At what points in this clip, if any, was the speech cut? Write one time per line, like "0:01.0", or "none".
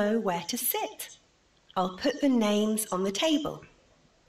0:03.1